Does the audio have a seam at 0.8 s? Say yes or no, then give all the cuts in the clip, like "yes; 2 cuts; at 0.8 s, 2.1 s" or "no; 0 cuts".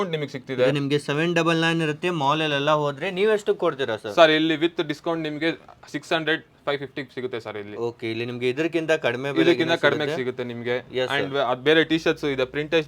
no; 0 cuts